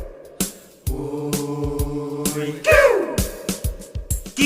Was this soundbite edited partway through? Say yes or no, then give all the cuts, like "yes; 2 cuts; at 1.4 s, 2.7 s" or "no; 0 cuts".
yes; 1 cut; at 3.3 s